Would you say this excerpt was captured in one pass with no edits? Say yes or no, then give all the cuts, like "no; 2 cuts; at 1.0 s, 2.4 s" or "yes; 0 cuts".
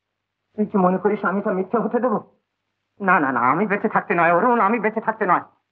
yes; 0 cuts